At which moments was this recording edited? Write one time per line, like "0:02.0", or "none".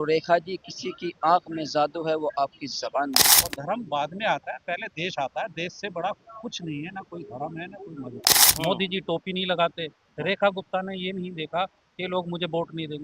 0:03.4
0:08.4